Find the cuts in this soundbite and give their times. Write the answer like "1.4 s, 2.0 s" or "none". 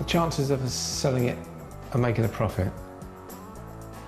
none